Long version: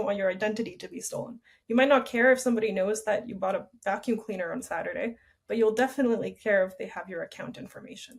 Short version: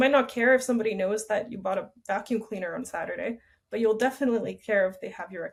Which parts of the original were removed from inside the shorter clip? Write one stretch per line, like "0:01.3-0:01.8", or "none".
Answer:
none